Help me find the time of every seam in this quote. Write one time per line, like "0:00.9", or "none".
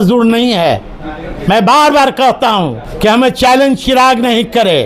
0:02.8